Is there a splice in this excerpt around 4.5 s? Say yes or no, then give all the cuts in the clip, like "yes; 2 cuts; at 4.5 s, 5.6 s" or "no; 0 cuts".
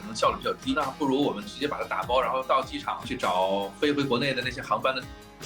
no; 2 cuts; at 0.8 s, 3.1 s